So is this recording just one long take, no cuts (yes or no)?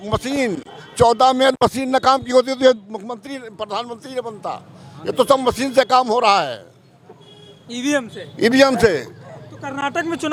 yes